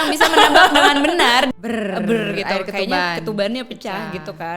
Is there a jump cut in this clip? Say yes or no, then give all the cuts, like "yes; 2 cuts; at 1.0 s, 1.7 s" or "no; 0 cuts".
yes; 1 cut; at 1.5 s